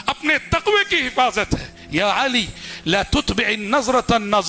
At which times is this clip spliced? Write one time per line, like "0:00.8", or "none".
none